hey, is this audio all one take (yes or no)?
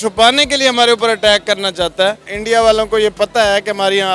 no